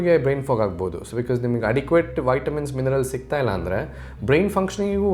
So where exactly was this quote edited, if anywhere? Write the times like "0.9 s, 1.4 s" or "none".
none